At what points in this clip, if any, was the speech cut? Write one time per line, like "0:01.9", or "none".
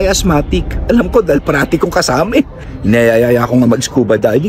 0:02.6